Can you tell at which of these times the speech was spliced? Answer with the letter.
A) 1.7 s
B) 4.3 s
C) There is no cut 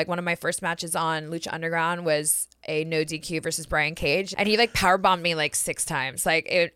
B